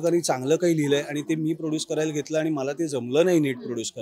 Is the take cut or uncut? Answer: uncut